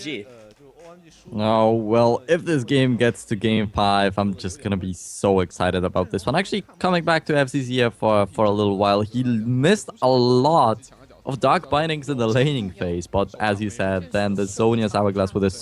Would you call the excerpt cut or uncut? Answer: cut